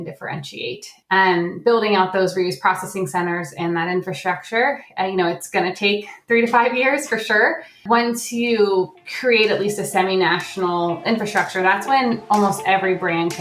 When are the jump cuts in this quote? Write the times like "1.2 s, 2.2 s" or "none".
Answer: 1.3 s, 7.8 s, 9.0 s